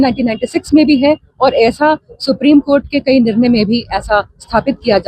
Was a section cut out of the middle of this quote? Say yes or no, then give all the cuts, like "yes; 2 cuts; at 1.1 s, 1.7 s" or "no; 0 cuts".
no; 0 cuts